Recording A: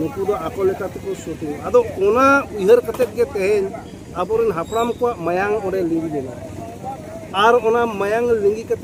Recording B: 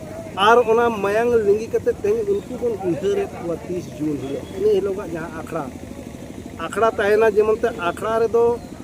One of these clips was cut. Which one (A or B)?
B